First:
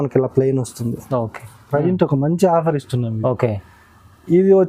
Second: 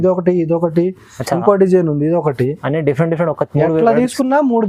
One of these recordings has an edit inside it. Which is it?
first; 1 cut; at 1.6 s

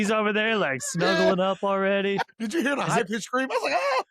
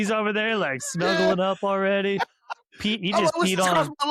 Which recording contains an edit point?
first; 1 cut; at 2.2 s

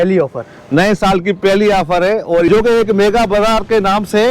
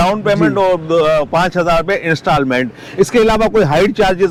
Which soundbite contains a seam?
first; 1 cut; at 2.5 s

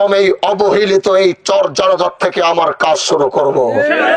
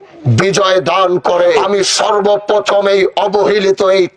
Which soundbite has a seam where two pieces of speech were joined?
second; 1 cut; at 1.6 s

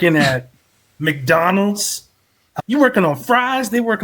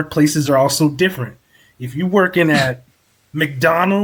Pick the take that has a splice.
first; 1 cut; at 2.6 s

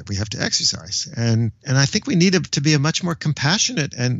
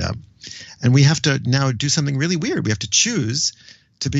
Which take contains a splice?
first; 1 cut; at 1.6 s

